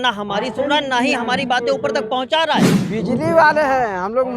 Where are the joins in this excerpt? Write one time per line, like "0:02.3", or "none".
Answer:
0:02.8